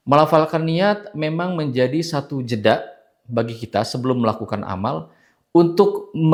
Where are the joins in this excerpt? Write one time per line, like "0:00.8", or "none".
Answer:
none